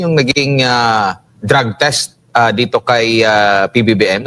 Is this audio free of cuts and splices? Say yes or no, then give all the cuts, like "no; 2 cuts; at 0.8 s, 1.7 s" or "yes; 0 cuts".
no; 1 cut; at 1.3 s